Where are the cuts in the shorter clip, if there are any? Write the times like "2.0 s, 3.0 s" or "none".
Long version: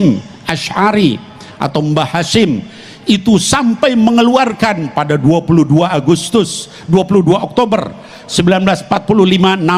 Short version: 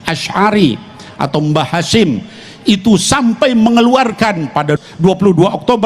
4.8 s